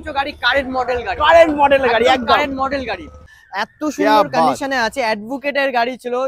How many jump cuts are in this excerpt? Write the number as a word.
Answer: one